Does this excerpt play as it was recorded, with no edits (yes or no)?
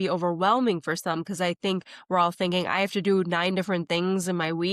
yes